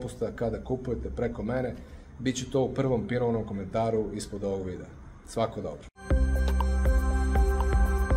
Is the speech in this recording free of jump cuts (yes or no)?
no